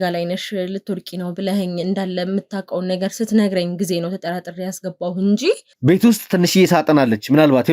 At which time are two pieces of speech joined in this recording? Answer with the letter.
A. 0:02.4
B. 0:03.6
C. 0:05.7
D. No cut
C